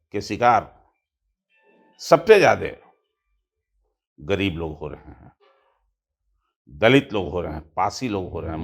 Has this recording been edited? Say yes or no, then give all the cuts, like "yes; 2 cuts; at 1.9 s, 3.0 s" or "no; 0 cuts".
no; 0 cuts